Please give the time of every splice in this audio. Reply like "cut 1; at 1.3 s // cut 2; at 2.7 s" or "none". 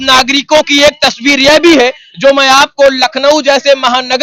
none